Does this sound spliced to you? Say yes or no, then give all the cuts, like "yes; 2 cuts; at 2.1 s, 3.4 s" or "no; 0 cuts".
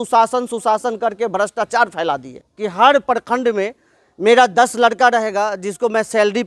yes; 1 cut; at 2.3 s